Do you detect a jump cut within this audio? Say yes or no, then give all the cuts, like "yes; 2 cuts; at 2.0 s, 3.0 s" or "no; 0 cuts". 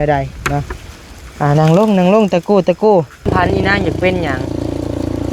yes; 1 cut; at 3.3 s